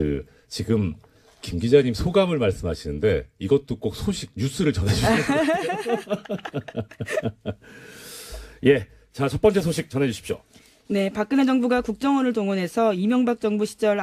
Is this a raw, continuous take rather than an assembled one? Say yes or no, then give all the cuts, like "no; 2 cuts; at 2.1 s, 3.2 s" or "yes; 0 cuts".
no; 1 cut; at 11.8 s